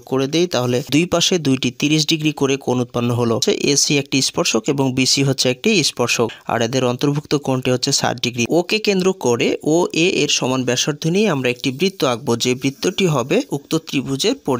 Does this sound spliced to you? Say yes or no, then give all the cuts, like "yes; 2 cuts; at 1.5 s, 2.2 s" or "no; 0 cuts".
yes; 2 cuts; at 3.4 s, 8.4 s